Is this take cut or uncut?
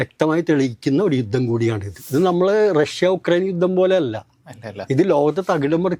cut